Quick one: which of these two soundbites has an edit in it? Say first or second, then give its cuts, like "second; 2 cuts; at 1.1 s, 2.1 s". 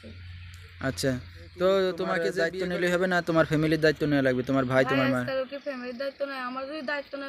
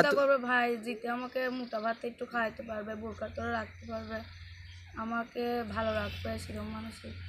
first; 1 cut; at 2.3 s